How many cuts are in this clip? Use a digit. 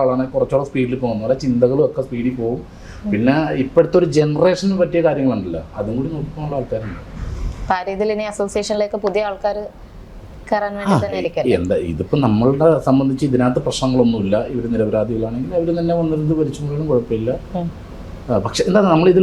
0